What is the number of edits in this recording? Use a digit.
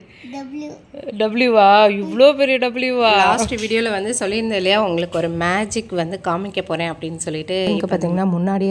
2